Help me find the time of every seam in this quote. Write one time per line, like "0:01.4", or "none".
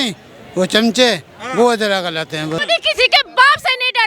0:02.6